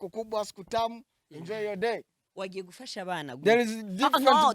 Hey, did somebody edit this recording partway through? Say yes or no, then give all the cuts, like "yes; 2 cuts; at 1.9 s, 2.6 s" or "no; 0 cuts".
yes; 1 cut; at 2.2 s